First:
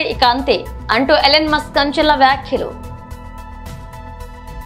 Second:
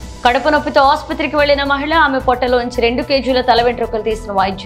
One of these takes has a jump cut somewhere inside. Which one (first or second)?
first